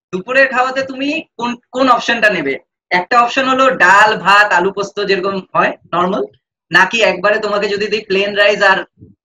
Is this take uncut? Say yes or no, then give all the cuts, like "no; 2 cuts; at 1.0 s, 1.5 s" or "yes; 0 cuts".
yes; 0 cuts